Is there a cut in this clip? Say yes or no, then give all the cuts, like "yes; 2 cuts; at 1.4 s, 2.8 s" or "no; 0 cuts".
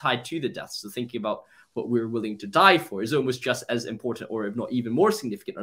no; 0 cuts